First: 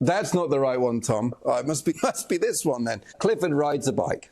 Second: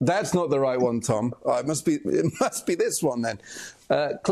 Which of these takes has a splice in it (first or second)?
first